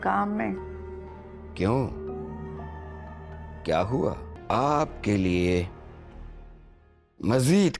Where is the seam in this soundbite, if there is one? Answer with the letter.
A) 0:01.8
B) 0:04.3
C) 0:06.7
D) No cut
B